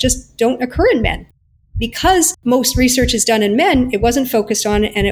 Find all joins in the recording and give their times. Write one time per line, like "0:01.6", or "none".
0:02.3